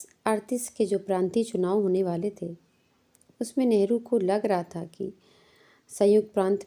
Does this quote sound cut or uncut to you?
uncut